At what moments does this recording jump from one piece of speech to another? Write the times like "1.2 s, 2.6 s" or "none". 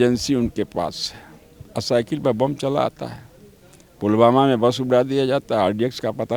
none